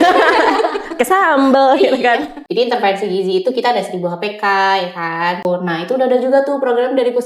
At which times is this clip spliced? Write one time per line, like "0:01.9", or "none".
0:02.4
0:05.4